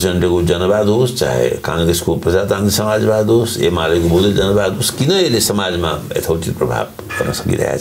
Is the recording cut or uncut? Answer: uncut